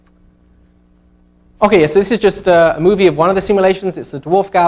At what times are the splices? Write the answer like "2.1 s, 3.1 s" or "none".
none